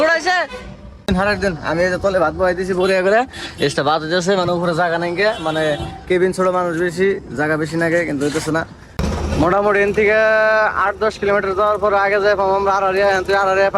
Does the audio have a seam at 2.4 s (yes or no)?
no